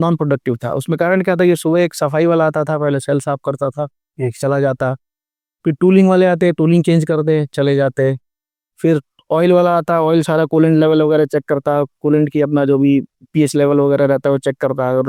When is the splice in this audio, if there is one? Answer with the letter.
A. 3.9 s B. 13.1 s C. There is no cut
C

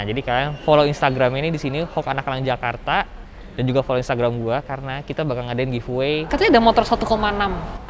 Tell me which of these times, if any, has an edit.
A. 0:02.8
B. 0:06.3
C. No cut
B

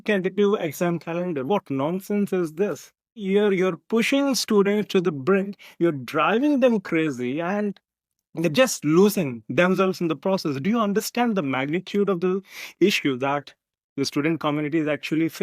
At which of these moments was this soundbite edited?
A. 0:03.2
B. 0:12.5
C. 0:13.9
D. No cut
A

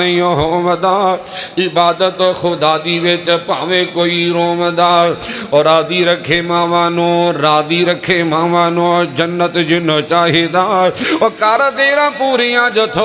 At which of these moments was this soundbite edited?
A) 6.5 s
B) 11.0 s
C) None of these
B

